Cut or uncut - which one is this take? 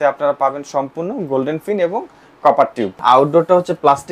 cut